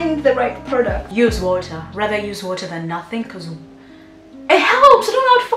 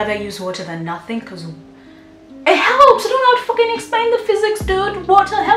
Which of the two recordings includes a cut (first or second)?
first